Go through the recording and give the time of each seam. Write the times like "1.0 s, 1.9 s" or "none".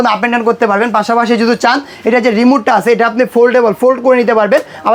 none